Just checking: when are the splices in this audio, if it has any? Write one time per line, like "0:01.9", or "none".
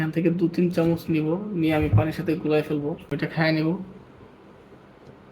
0:03.1